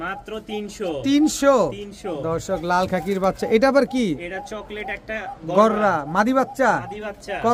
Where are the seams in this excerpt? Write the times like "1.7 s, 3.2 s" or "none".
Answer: none